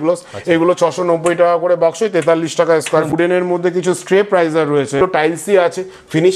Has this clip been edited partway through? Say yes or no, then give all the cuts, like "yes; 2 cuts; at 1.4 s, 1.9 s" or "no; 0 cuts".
yes; 2 cuts; at 3.1 s, 5.0 s